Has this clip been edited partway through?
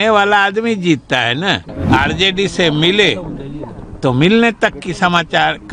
yes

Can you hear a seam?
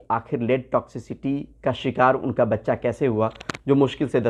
no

